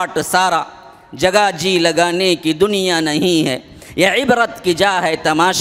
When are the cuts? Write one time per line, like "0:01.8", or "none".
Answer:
none